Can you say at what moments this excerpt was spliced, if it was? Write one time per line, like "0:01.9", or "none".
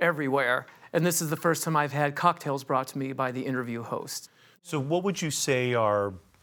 0:04.2